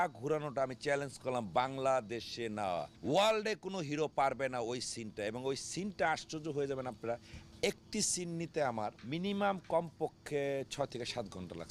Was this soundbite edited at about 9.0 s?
yes; 2 cuts; at 2.9 s, 9.0 s

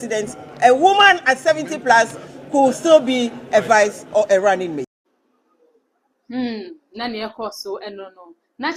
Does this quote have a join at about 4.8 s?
no; 0 cuts

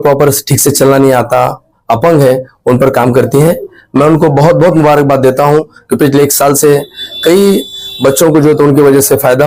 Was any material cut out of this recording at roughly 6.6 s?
no; 0 cuts

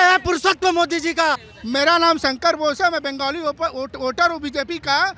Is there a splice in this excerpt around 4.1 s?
no; 1 cut; at 1.5 s

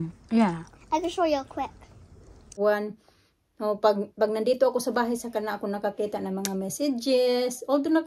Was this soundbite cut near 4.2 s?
no; 1 cut; at 2.5 s

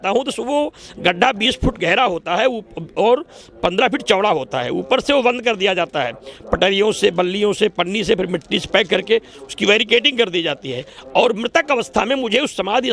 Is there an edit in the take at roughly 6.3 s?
no; 0 cuts

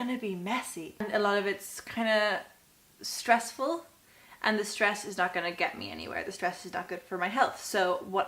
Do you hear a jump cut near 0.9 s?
yes; 1 cut; at 0.9 s

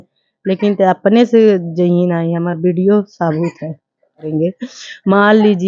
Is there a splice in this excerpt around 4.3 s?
yes; 1 cut; at 4.3 s

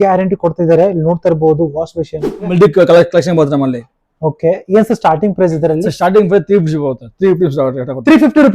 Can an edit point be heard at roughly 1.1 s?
no; 1 cut; at 2.5 s

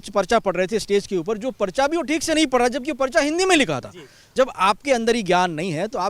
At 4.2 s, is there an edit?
yes; 1 cut; at 4.2 s

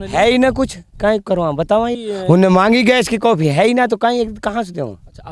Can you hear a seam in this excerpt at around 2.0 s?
yes; 1 cut; at 2.0 s

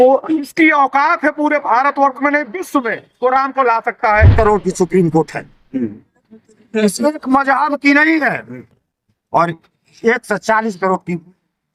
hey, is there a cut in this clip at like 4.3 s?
yes; 1 cut; at 4.3 s

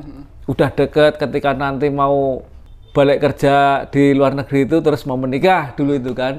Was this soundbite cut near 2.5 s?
yes; 1 cut; at 2.5 s

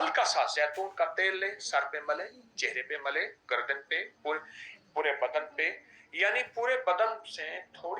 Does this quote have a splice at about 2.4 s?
no; 0 cuts

